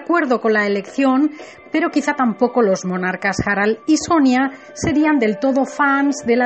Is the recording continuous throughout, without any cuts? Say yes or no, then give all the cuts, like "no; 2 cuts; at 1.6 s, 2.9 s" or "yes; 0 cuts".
no; 1 cut; at 1.3 s